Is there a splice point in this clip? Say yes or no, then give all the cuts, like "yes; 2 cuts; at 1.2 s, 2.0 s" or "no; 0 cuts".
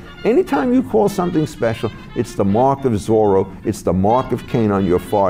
no; 0 cuts